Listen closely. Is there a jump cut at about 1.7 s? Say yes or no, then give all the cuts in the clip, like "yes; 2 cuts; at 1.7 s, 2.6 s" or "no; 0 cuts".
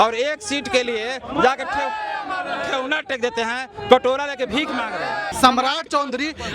no; 1 cut; at 5.3 s